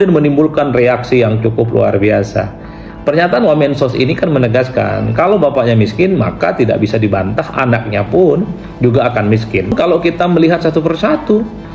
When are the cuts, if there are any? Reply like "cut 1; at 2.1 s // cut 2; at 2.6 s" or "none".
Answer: cut 1; at 9.7 s